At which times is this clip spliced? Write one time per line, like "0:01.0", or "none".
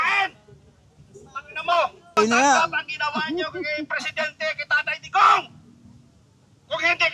0:02.2